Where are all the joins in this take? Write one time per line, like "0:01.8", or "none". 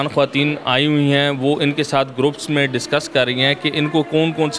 none